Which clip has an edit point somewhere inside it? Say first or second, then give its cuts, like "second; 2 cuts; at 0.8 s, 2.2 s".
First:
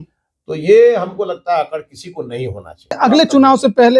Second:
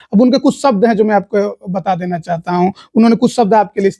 first; 1 cut; at 3.0 s